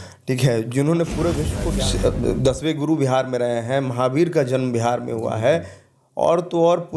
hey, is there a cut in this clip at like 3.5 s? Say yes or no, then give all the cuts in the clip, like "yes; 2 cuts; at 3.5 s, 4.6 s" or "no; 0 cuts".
no; 1 cut; at 1.5 s